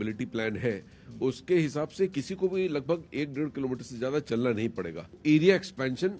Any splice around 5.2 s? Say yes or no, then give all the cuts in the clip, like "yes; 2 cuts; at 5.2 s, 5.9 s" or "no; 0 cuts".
yes; 1 cut; at 5.2 s